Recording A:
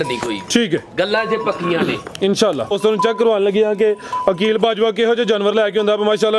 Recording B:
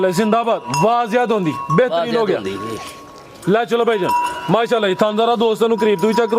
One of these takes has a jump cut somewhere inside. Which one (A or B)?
A